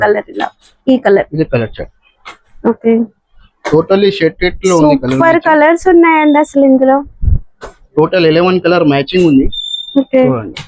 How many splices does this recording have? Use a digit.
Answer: 0